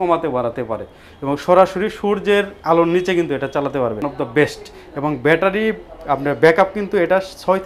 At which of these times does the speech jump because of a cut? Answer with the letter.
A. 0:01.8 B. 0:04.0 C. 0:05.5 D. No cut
B